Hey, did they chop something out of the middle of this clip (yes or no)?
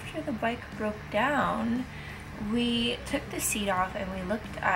no